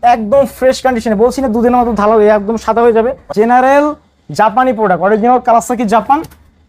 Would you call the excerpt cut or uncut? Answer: cut